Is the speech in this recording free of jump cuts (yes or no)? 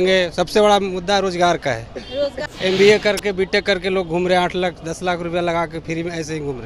no